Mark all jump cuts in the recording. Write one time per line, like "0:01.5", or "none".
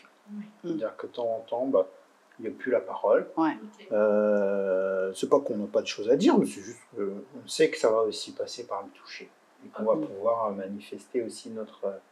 none